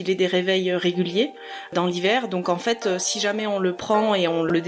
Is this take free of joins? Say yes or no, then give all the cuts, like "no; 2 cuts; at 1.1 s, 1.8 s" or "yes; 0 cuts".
yes; 0 cuts